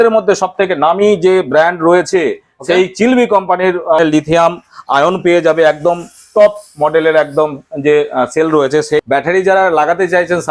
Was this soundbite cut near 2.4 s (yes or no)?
no